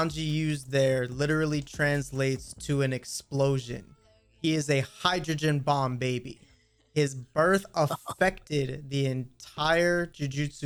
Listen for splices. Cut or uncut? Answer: uncut